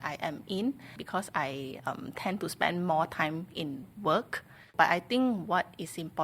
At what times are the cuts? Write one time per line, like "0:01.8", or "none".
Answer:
0:01.0
0:04.6